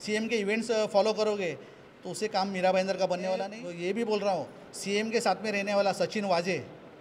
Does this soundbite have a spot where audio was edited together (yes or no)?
yes